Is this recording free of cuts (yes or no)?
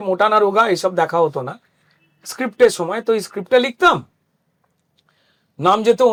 yes